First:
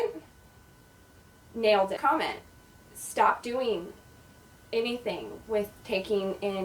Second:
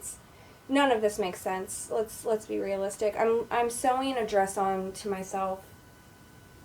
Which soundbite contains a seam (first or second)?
first